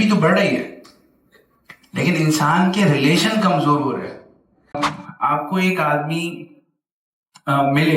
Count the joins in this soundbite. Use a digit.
1